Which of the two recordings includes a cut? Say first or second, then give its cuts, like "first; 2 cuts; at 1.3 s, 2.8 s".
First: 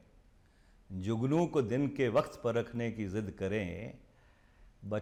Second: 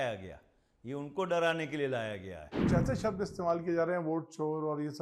second; 1 cut; at 2.4 s